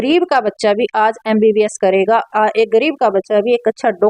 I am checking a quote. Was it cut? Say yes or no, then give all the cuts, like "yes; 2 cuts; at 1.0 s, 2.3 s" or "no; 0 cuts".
no; 0 cuts